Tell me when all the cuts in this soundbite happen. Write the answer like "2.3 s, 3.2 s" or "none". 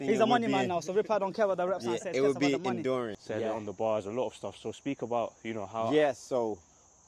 3.2 s